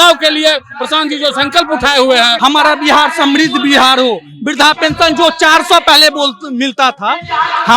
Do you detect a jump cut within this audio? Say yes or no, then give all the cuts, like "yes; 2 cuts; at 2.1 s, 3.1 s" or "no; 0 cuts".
yes; 1 cut; at 2.3 s